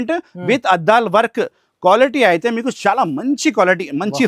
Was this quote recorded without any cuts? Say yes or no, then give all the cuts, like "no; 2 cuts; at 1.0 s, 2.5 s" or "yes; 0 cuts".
yes; 0 cuts